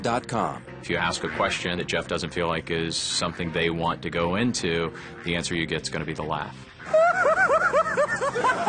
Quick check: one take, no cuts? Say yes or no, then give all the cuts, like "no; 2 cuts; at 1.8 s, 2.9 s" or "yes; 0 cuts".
yes; 0 cuts